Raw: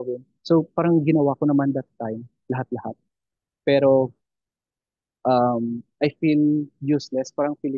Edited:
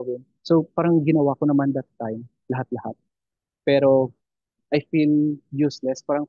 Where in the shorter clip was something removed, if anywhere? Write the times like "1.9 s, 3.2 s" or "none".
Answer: 4.5 s